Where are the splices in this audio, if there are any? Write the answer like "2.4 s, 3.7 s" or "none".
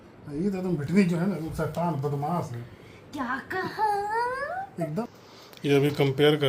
5.0 s